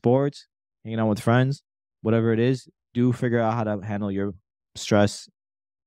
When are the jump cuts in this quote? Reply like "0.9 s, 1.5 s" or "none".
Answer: none